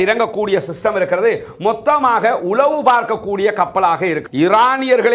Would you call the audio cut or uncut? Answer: cut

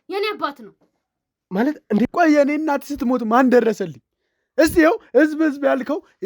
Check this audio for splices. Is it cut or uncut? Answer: cut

